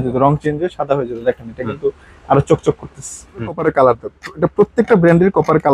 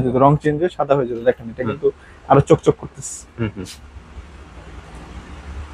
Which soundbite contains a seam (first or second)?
first